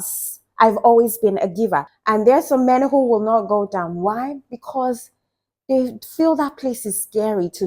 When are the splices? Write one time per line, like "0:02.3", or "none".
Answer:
0:01.9